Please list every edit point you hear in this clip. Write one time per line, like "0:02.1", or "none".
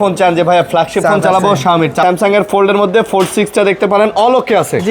0:02.0